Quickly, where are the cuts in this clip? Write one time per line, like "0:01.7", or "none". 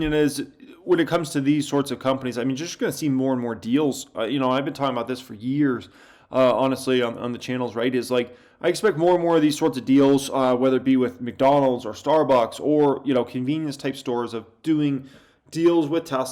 none